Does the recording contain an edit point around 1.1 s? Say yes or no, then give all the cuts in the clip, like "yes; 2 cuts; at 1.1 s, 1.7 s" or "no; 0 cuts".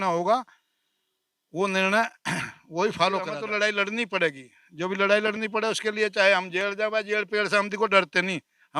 no; 1 cut; at 3.4 s